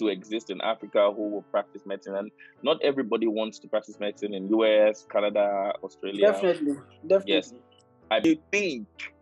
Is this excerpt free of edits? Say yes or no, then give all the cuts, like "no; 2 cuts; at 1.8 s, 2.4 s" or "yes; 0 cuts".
no; 1 cut; at 8.2 s